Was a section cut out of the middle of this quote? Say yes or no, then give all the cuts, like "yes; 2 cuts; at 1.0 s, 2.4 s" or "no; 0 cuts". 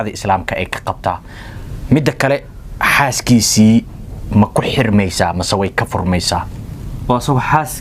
no; 0 cuts